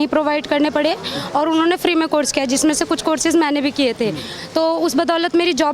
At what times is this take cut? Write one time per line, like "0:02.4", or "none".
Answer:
none

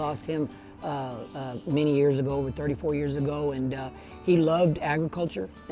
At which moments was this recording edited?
none

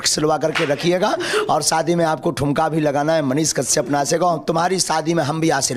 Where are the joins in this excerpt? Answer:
none

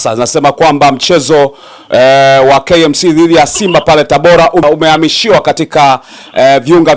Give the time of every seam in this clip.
0:04.6

